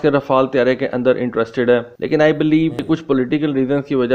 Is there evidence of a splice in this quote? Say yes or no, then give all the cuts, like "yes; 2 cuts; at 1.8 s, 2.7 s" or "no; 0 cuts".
no; 0 cuts